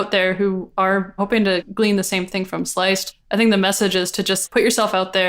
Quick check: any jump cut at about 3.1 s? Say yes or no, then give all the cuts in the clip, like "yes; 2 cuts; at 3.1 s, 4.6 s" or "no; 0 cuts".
yes; 3 cuts; at 1.3 s, 3.1 s, 4.4 s